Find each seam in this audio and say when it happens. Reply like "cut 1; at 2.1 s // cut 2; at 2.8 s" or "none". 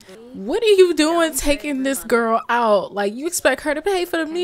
none

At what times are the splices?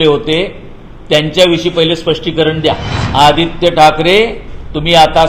cut 1; at 2.9 s

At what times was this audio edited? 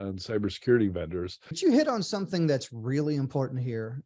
cut 1; at 1.6 s

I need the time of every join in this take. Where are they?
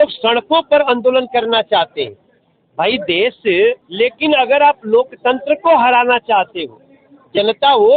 cut 1; at 3.8 s

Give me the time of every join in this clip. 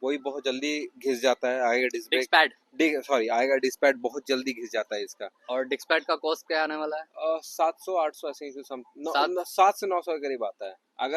none

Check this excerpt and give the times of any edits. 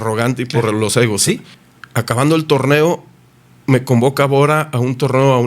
cut 1; at 1.5 s

